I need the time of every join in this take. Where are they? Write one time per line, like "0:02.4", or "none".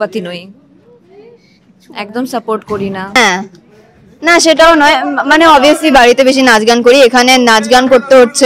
0:03.2